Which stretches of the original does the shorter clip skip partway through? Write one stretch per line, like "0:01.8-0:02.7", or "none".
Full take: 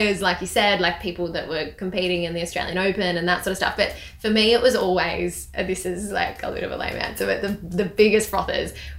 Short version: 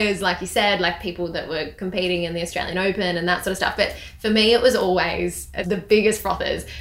0:05.5-0:07.6